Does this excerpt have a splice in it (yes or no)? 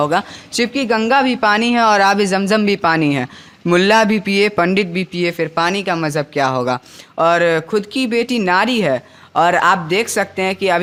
no